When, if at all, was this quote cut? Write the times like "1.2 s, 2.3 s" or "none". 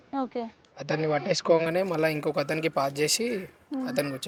none